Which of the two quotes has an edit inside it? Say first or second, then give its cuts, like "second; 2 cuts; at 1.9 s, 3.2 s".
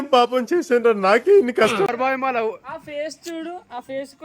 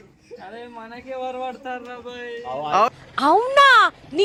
first; 1 cut; at 1.9 s